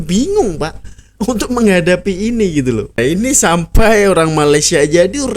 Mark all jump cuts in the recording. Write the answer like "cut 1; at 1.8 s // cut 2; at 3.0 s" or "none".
cut 1; at 3.0 s